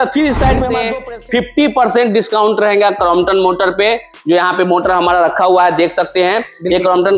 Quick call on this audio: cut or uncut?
cut